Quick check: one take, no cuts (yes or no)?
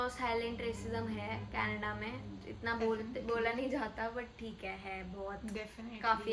yes